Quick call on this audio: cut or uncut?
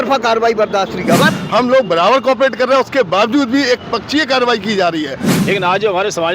cut